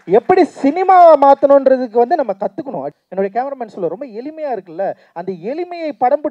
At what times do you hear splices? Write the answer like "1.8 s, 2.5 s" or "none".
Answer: 2.9 s

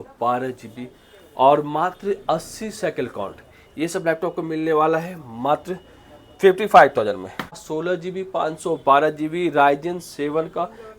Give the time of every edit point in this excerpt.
7.6 s

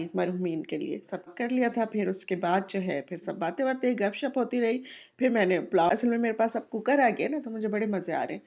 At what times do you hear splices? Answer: 1.3 s, 5.9 s

